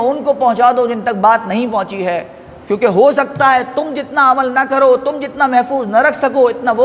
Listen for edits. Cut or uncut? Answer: uncut